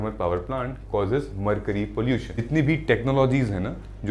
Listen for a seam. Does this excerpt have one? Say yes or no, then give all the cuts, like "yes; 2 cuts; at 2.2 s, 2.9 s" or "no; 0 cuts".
yes; 1 cut; at 2.5 s